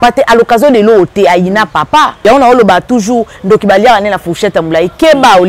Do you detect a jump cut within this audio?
yes; 1 cut; at 2.1 s

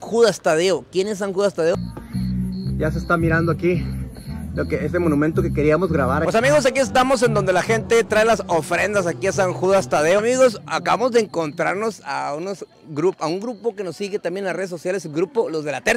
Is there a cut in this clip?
yes; 3 cuts; at 1.8 s, 6.2 s, 10.2 s

